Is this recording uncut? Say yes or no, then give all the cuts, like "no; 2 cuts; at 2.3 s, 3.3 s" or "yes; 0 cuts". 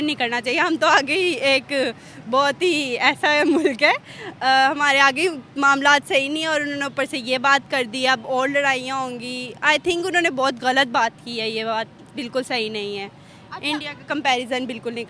yes; 0 cuts